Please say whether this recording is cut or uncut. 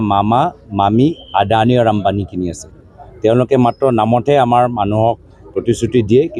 uncut